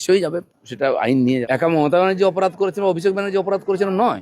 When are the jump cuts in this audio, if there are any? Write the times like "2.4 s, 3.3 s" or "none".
1.4 s